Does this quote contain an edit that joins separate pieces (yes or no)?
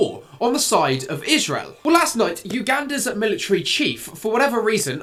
no